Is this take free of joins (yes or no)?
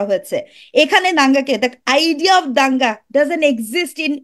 yes